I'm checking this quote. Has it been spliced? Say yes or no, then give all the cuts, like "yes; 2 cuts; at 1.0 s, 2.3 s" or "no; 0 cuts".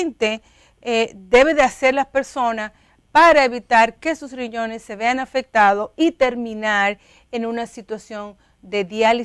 no; 0 cuts